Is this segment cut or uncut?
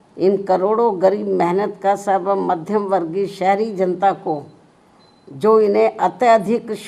uncut